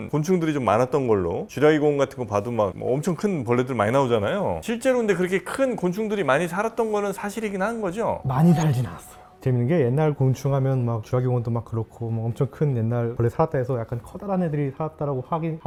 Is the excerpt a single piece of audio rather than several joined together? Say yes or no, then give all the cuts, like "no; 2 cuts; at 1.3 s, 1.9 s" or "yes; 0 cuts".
yes; 0 cuts